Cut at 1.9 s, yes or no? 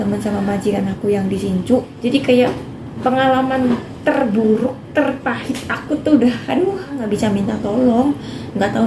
yes